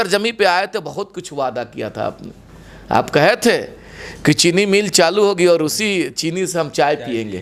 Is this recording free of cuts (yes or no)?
yes